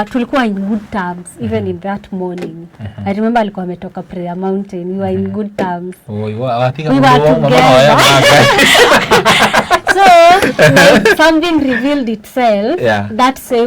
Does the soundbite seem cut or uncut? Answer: uncut